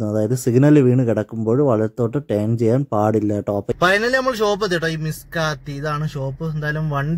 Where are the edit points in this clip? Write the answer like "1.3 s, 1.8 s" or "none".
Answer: 3.7 s